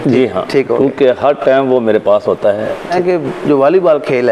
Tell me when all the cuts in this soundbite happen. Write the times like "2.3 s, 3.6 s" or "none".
2.9 s